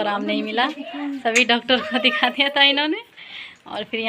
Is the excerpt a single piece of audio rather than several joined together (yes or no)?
yes